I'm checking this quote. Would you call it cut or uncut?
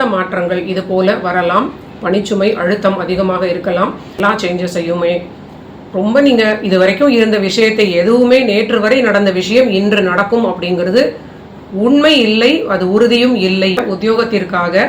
cut